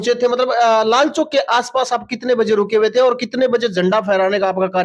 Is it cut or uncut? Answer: uncut